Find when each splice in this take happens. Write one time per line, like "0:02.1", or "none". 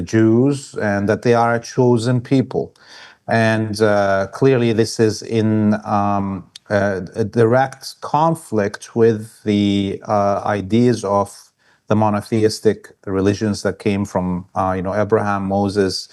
none